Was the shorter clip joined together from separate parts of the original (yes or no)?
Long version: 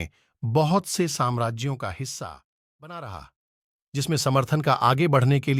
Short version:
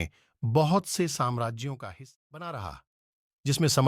yes